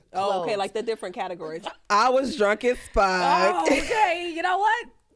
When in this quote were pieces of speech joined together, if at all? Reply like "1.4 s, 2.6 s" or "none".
1.6 s